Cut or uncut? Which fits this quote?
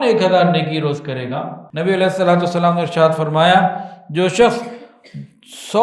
cut